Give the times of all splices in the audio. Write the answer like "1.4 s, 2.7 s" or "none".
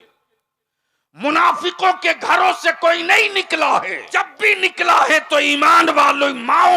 4.0 s